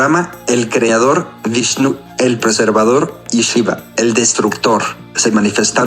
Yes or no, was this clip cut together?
yes